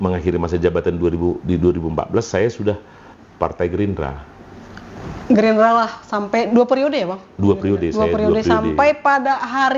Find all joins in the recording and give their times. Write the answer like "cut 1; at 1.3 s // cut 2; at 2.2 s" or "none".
cut 1; at 3.1 s